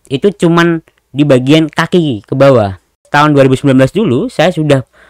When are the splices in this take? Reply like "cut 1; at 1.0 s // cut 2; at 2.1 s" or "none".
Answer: cut 1; at 3.1 s